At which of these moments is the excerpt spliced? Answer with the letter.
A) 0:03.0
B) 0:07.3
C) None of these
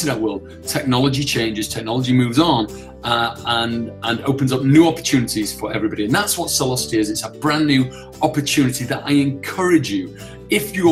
C